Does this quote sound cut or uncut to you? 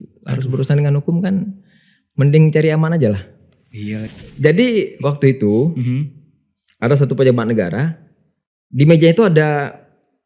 cut